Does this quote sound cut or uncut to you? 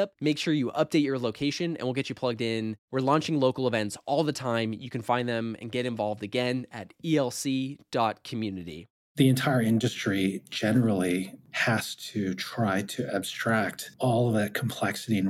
cut